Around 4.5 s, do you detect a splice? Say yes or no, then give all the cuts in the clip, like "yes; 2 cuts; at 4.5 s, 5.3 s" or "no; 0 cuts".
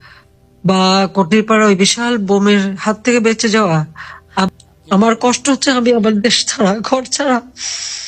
yes; 1 cut; at 4.5 s